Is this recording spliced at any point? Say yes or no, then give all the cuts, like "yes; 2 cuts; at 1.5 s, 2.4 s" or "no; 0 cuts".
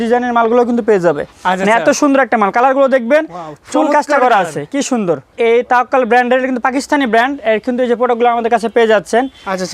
yes; 2 cuts; at 1.3 s, 5.3 s